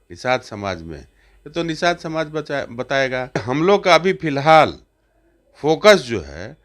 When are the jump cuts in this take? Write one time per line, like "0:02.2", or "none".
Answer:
0:03.4

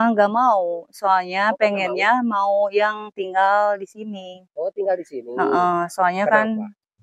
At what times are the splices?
none

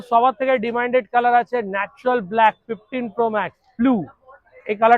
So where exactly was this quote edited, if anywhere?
0:03.6

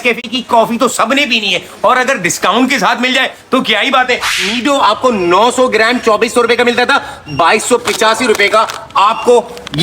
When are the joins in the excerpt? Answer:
0:04.4

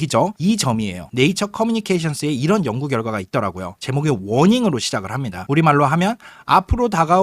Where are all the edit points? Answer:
0:01.0

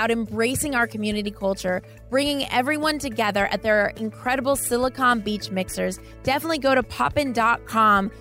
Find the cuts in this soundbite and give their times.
none

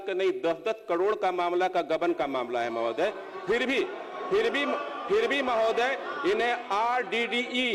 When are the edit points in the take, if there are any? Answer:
none

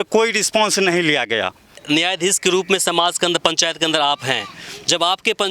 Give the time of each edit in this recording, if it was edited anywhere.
0:01.8

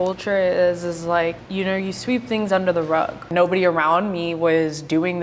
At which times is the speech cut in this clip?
0:01.4
0:03.3

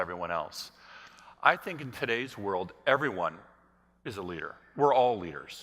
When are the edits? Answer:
0:04.2

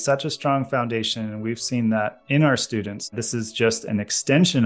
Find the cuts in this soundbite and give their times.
0:03.1

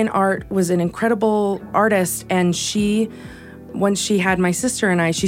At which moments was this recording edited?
0:01.7
0:03.7

